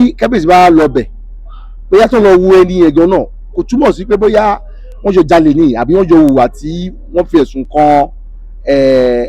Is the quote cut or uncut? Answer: uncut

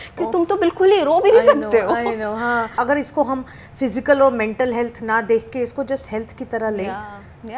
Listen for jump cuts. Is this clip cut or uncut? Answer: cut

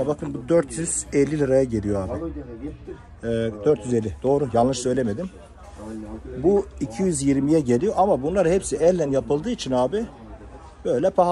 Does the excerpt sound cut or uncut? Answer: uncut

